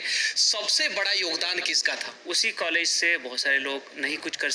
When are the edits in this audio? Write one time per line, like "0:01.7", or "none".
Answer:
0:02.1